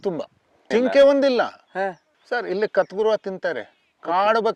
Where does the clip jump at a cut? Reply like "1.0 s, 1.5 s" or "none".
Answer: none